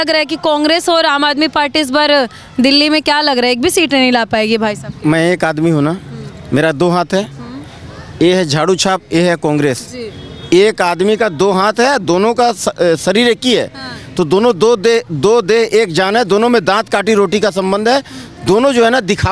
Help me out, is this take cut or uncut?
uncut